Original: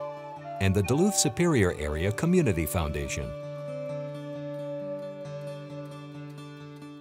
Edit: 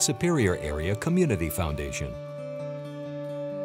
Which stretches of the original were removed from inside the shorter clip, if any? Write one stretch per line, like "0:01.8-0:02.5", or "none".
0:03.2-0:03.3